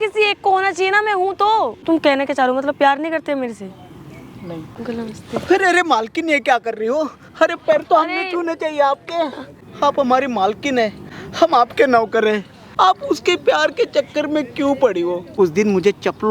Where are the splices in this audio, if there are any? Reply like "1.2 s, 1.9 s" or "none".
1.8 s, 4.7 s, 9.5 s, 12.6 s, 15.2 s